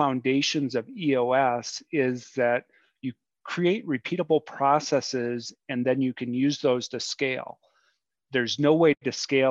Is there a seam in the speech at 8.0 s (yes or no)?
no